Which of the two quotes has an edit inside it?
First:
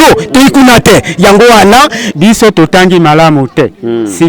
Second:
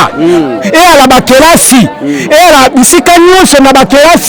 first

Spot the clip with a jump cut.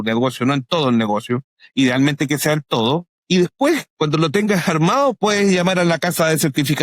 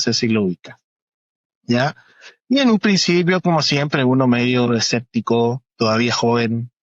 first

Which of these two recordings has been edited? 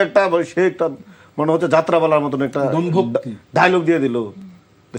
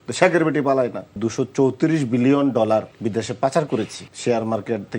second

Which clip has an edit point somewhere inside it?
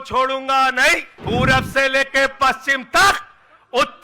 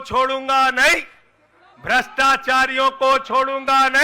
first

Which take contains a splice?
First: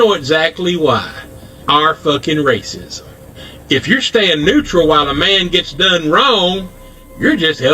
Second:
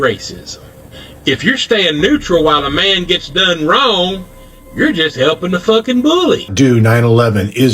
second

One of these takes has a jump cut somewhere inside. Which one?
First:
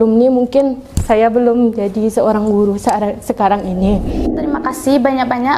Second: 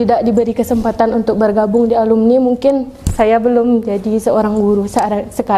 first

